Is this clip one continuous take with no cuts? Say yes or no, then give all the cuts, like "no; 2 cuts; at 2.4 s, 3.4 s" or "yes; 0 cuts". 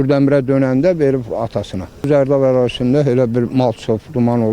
no; 1 cut; at 2.1 s